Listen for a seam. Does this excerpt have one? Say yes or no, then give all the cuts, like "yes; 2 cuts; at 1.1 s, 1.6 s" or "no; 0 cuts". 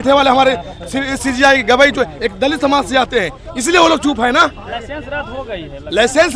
no; 0 cuts